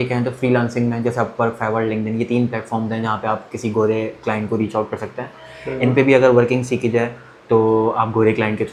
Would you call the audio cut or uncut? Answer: uncut